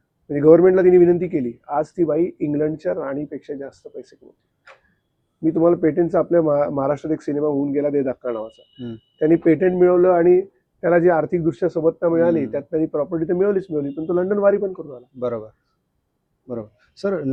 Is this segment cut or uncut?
uncut